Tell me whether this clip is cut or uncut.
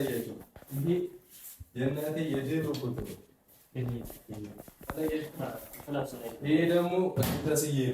uncut